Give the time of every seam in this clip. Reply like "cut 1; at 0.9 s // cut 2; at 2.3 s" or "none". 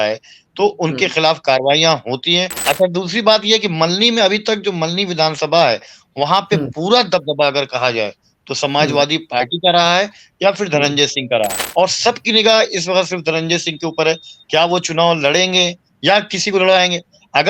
cut 1; at 2.5 s // cut 2; at 11.6 s